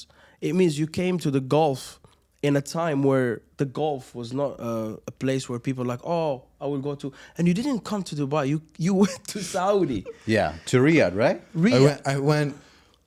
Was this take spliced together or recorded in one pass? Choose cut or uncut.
uncut